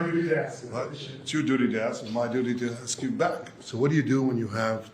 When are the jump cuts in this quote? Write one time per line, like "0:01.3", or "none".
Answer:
0:03.6